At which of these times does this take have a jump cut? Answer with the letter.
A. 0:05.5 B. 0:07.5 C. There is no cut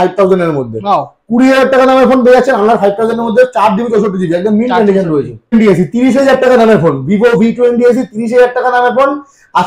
A